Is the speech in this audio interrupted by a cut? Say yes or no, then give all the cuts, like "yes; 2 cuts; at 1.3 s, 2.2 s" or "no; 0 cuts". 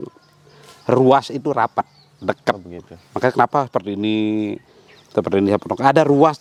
no; 0 cuts